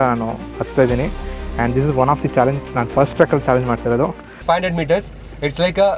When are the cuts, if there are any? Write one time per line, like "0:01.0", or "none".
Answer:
0:04.4